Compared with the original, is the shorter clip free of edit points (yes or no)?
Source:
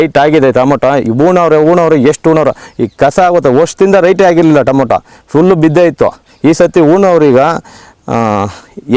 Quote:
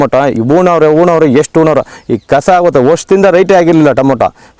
yes